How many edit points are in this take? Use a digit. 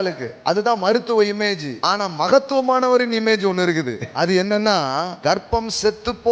3